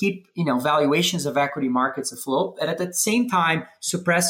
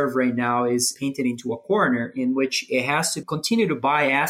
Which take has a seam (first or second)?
second